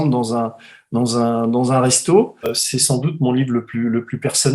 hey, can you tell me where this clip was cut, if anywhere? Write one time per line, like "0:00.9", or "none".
0:02.6